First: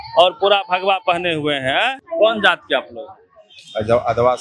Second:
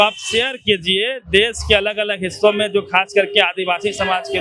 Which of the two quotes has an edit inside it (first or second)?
first